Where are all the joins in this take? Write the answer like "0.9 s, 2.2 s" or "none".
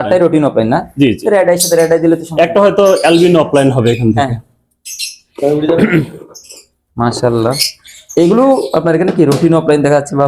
none

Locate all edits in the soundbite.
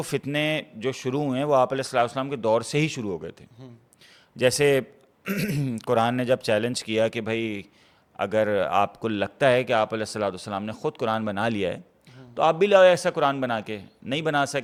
none

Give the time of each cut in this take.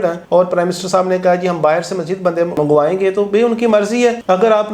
none

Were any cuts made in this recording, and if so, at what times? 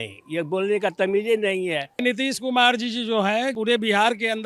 2.0 s, 3.6 s

